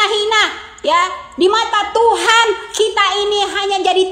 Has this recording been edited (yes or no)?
no